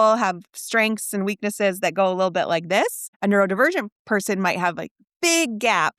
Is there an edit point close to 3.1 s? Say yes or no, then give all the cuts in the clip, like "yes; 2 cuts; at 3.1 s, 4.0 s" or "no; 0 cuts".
yes; 1 cut; at 3.1 s